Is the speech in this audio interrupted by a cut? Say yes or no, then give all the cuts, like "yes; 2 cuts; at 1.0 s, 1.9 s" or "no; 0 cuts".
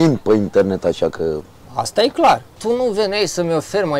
yes; 1 cut; at 2.5 s